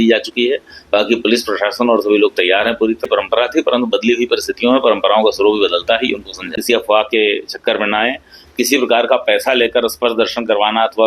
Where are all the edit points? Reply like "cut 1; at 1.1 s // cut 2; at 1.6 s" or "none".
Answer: cut 1; at 3.1 s // cut 2; at 6.5 s